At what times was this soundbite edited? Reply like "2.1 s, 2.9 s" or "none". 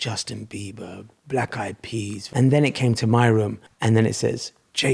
2.2 s, 3.6 s